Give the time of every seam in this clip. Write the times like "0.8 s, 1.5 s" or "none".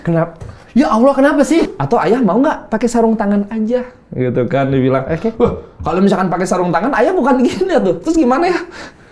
1.8 s